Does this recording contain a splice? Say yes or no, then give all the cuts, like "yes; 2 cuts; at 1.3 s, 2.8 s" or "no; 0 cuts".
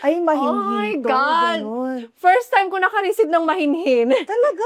no; 0 cuts